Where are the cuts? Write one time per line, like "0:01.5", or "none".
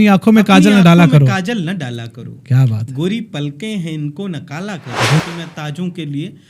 0:05.2